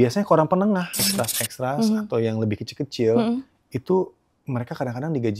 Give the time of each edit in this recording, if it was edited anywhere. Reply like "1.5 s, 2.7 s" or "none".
1.0 s

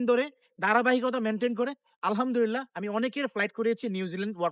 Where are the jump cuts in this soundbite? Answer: none

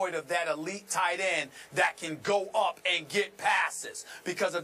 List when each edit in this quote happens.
none

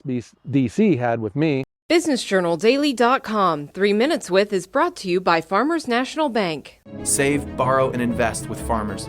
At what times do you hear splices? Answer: 1.7 s

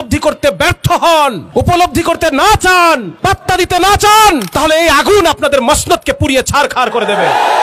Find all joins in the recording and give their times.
1.4 s, 3.1 s, 4.5 s

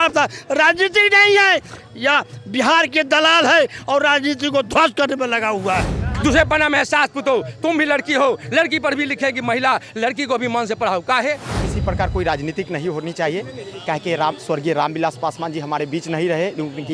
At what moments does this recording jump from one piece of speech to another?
6.0 s, 11.6 s

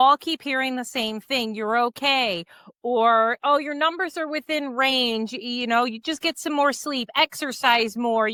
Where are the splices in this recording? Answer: none

